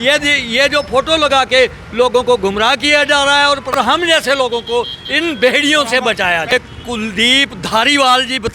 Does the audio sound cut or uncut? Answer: cut